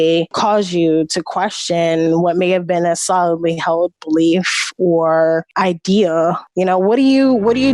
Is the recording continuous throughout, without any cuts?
no; 1 cut; at 6.4 s

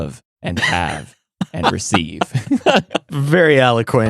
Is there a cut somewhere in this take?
yes; 1 cut; at 3.0 s

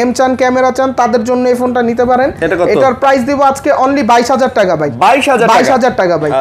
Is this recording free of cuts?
yes; 0 cuts

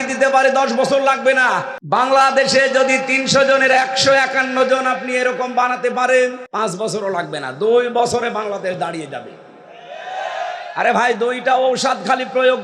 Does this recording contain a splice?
yes; 2 cuts; at 1.7 s, 6.4 s

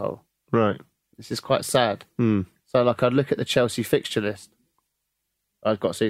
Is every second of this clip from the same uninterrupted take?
yes; 0 cuts

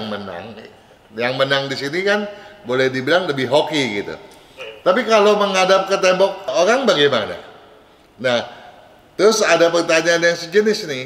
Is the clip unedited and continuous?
yes; 0 cuts

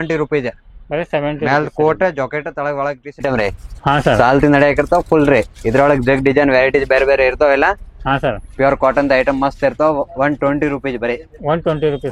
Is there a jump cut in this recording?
yes; 1 cut; at 3.1 s

